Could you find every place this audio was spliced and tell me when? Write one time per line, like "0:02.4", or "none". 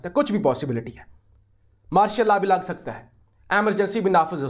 none